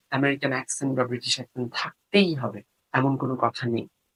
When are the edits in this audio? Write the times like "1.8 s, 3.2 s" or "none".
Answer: none